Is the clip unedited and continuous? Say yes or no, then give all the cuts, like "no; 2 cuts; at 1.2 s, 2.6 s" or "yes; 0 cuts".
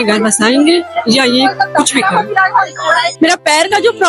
no; 1 cut; at 3.1 s